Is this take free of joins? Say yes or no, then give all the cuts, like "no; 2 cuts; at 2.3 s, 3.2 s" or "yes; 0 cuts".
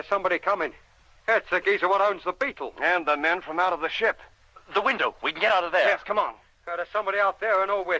yes; 0 cuts